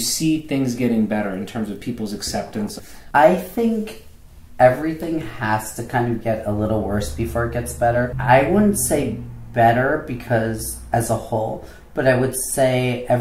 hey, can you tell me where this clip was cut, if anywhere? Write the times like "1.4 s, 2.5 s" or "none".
2.7 s, 8.1 s